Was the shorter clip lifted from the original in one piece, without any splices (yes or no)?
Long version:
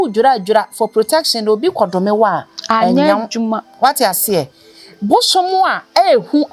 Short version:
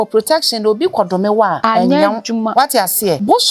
no